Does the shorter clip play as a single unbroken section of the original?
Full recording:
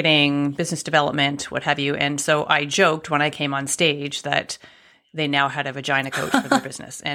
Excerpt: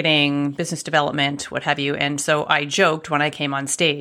yes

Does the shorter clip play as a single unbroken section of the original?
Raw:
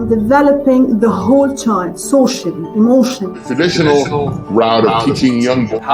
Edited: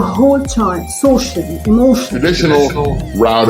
no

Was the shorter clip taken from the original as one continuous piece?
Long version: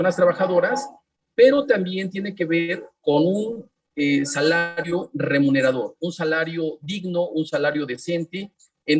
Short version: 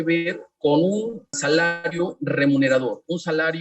no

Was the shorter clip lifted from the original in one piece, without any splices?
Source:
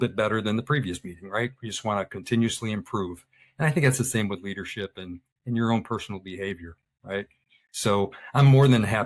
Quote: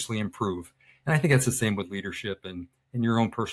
yes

